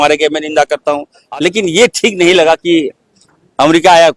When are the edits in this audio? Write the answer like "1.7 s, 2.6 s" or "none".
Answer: 1.1 s